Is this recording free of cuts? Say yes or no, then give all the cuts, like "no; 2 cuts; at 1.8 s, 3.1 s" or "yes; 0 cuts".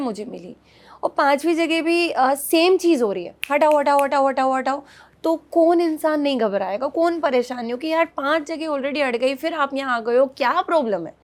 yes; 0 cuts